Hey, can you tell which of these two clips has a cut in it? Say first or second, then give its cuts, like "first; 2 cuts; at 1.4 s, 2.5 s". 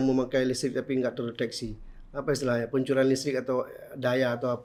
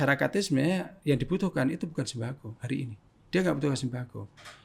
second; 1 cut; at 0.9 s